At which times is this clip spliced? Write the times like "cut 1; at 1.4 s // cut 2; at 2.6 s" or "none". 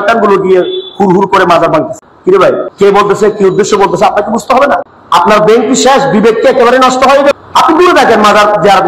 cut 1; at 2.5 s // cut 2; at 4.9 s // cut 3; at 7.3 s